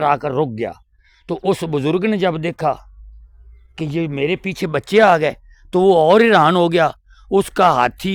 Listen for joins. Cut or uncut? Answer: uncut